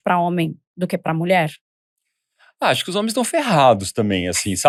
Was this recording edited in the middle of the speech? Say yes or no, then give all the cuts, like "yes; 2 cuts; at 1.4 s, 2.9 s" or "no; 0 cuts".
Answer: no; 0 cuts